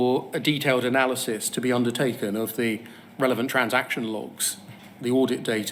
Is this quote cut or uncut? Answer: uncut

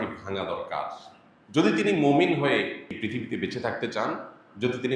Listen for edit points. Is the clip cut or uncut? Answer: cut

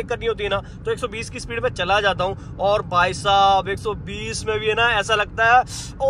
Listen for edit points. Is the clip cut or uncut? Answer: uncut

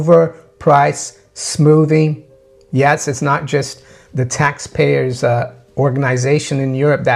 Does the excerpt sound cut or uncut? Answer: cut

